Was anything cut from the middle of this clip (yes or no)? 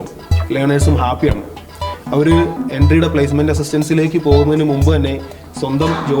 yes